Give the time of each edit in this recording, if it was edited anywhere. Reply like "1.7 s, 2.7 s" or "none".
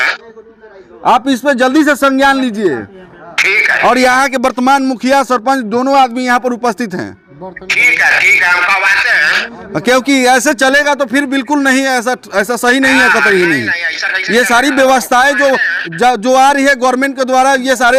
none